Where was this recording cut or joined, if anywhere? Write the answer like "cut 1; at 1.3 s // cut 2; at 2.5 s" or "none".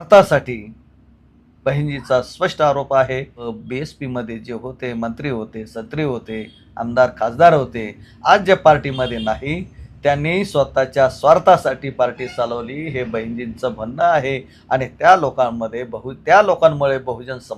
cut 1; at 3.5 s